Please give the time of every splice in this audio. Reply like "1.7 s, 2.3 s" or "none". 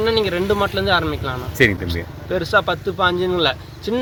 none